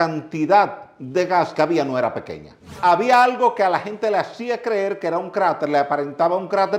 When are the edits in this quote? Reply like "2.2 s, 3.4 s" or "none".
2.8 s

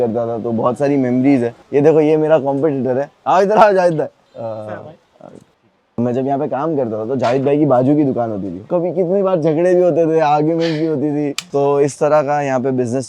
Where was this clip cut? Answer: 1.6 s, 4.2 s, 6.0 s, 8.6 s, 11.4 s

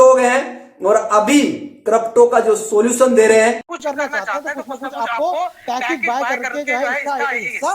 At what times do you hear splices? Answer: 3.7 s, 6.8 s

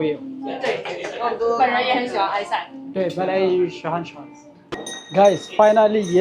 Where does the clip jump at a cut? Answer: 4.9 s

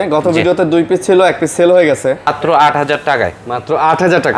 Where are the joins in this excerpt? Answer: 2.3 s

